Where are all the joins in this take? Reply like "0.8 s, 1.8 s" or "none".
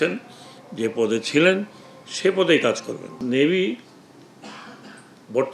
3.1 s